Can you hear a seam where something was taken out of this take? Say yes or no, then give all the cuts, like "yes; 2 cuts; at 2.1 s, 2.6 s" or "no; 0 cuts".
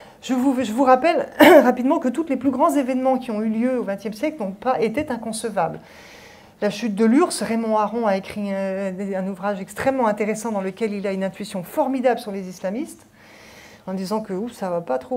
no; 0 cuts